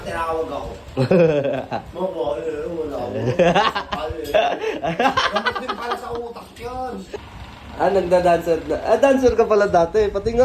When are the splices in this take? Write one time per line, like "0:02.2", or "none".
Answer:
0:07.3